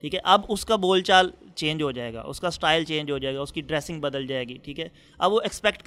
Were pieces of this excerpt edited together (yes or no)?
no